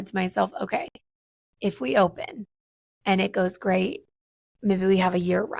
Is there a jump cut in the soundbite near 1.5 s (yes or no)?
no